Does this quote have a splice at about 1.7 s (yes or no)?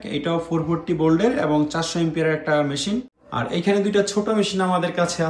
no